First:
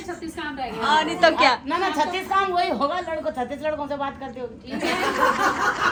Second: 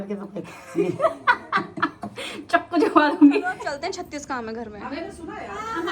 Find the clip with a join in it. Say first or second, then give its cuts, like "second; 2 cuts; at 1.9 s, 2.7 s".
second; 1 cut; at 3.6 s